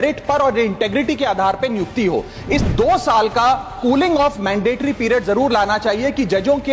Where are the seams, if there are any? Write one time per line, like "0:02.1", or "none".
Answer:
0:02.6